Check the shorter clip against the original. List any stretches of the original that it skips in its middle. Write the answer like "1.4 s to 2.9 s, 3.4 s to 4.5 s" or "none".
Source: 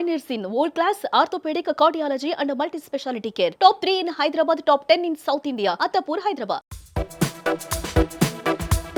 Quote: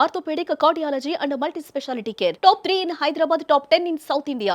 none